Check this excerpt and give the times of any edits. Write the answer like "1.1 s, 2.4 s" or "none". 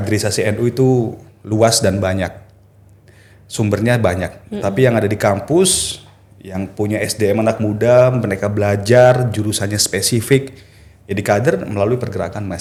none